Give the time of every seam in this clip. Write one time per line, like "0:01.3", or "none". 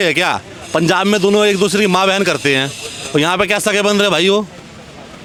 none